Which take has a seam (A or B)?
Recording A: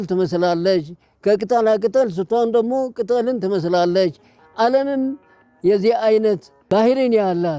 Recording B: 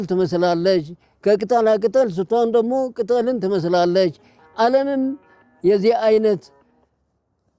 A